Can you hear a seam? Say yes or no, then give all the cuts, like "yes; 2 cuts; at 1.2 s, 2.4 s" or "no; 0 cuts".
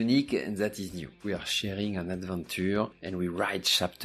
yes; 2 cuts; at 1.3 s, 3.0 s